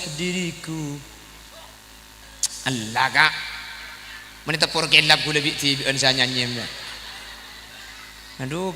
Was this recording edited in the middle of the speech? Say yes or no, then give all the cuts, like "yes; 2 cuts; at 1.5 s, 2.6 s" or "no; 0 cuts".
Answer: yes; 1 cut; at 2.2 s